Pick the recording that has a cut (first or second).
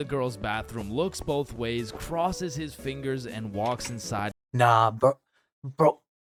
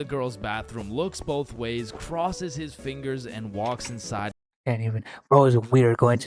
second